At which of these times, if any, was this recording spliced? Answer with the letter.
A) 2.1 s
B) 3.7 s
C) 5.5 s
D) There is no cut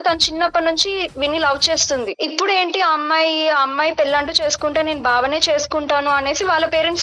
A